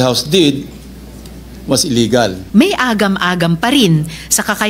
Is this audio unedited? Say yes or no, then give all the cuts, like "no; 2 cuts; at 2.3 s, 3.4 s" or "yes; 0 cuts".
no; 1 cut; at 2.4 s